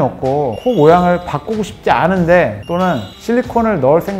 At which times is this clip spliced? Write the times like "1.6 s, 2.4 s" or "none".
none